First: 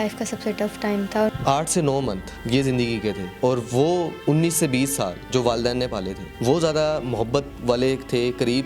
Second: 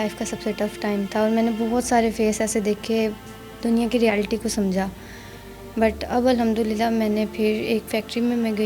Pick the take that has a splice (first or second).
first